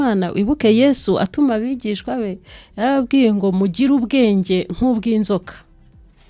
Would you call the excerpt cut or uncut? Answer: uncut